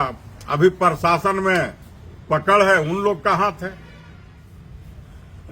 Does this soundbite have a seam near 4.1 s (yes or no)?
yes